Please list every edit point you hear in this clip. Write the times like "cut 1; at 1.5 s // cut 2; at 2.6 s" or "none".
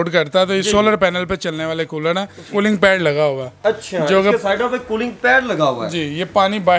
cut 1; at 2.4 s